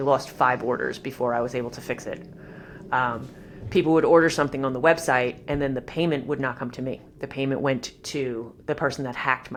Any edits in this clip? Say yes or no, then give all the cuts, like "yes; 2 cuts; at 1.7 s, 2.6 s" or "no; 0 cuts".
no; 0 cuts